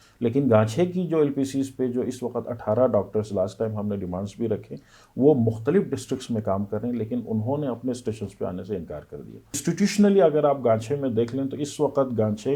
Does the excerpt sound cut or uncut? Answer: cut